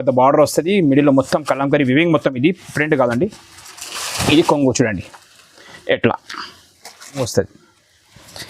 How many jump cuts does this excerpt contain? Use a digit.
1